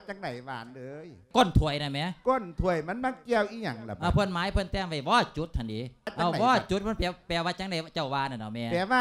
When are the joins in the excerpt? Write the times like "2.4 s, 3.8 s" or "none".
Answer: 1.3 s, 6.1 s